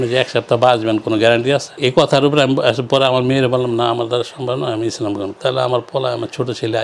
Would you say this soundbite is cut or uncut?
uncut